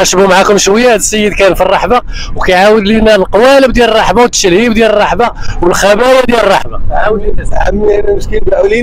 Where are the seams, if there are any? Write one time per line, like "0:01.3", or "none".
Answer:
none